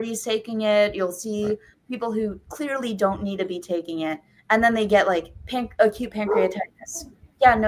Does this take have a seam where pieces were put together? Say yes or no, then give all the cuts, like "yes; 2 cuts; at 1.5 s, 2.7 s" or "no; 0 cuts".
no; 0 cuts